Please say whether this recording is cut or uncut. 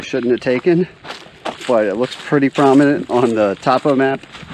uncut